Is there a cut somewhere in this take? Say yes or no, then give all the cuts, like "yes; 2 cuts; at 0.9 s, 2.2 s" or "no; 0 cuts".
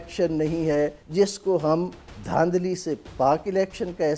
yes; 1 cut; at 1.0 s